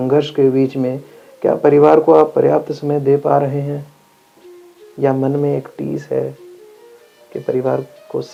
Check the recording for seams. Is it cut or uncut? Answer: uncut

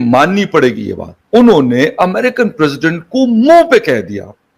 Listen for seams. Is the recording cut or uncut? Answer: cut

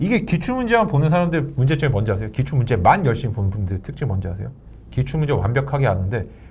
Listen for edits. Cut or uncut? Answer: uncut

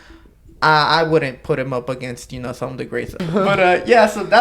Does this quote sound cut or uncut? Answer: cut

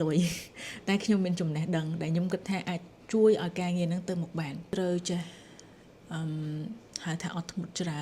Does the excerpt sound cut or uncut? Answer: cut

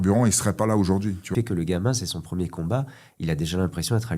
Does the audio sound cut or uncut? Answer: cut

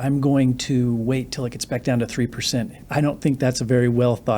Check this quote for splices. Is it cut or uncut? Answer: cut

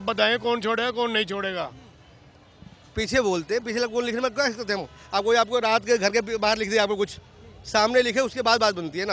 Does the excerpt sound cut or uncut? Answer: uncut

